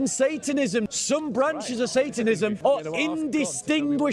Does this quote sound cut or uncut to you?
cut